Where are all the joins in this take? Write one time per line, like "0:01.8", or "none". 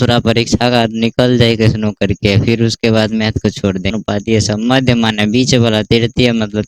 0:03.9